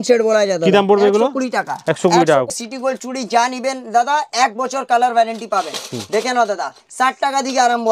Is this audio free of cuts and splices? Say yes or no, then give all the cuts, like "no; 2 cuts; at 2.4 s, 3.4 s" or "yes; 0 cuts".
no; 1 cut; at 2.5 s